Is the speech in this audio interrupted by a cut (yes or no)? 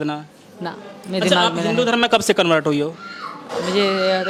no